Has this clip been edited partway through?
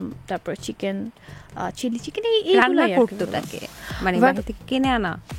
no; 0 cuts

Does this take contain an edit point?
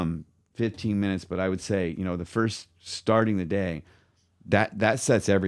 no; 0 cuts

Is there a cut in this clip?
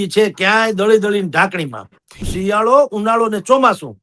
yes; 1 cut; at 2.3 s

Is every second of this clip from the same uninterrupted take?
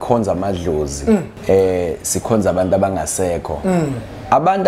no; 1 cut; at 1.3 s

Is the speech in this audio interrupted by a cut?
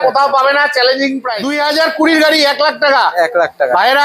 yes; 1 cut; at 1.4 s

